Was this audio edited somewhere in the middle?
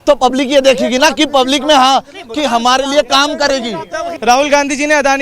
yes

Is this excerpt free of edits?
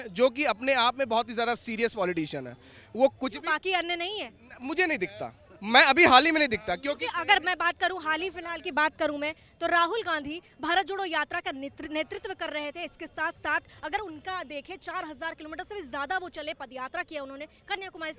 yes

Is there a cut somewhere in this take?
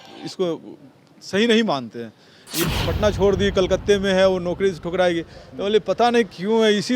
yes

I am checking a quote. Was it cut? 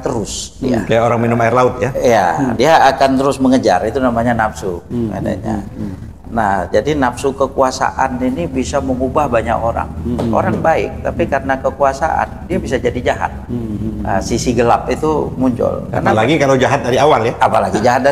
no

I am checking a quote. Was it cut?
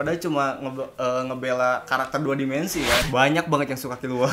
yes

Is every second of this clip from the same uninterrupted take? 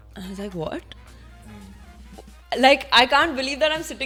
yes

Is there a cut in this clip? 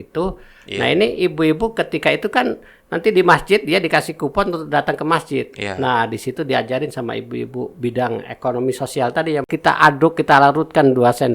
yes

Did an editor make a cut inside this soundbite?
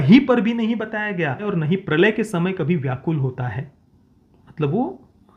yes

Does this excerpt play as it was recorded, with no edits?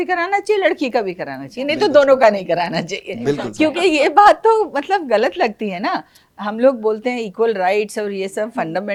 yes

